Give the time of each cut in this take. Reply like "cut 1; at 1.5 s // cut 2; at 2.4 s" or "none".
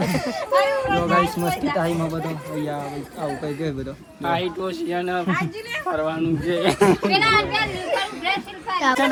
none